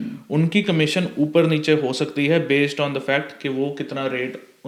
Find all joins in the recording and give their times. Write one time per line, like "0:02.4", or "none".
none